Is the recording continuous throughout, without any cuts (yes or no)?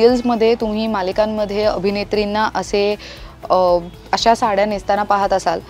yes